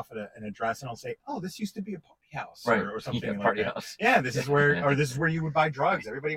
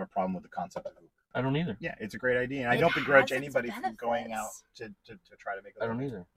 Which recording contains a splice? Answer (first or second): second